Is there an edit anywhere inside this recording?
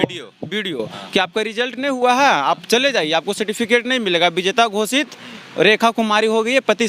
no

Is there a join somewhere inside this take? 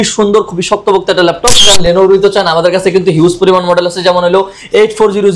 yes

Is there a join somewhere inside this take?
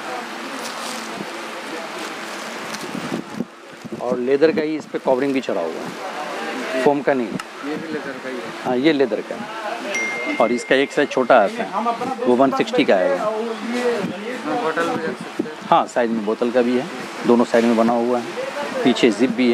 yes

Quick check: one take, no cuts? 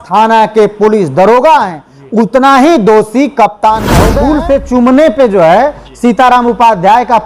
no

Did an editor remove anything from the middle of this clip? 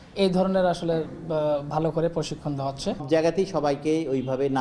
yes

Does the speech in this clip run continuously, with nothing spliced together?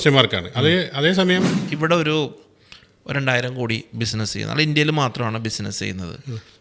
no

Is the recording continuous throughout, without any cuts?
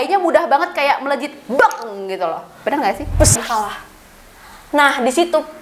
no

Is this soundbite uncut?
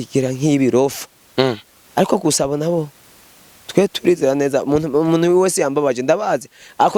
yes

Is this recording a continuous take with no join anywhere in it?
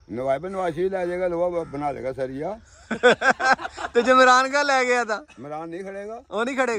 yes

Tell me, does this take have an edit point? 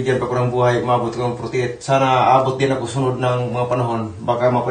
no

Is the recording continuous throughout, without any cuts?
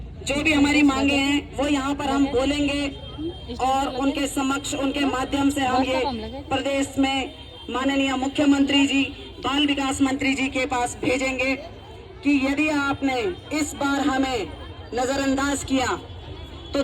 yes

